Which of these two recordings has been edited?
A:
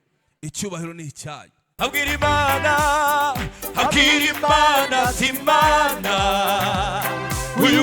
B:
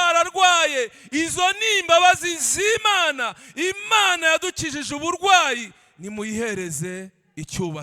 A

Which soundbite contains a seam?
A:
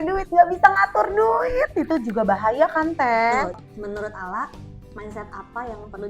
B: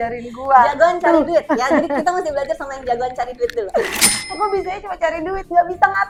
A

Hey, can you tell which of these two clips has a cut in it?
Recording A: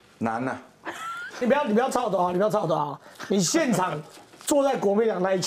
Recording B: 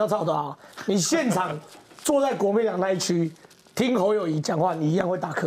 A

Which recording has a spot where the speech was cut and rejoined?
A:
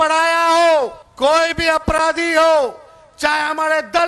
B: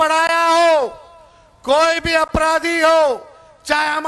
A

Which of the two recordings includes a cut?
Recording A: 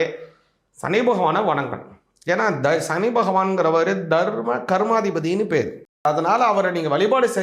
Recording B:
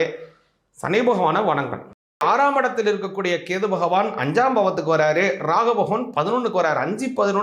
B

